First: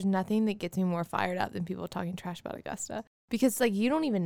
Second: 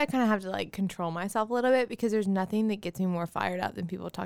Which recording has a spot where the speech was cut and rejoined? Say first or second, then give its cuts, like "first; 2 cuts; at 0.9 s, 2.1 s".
first; 1 cut; at 3.1 s